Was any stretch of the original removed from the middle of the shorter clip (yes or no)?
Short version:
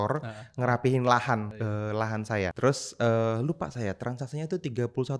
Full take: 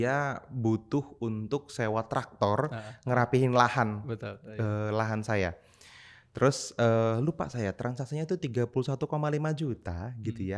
yes